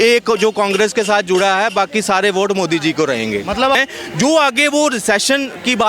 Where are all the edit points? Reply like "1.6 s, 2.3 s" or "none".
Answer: 3.7 s